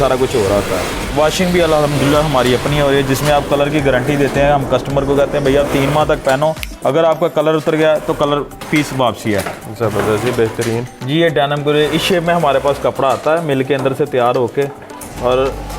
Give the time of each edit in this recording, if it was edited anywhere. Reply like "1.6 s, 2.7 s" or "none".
1.1 s, 10.9 s